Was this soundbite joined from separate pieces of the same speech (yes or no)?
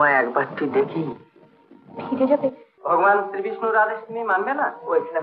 yes